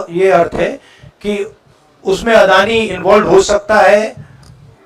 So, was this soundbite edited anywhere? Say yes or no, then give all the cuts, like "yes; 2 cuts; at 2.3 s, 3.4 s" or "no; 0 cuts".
no; 0 cuts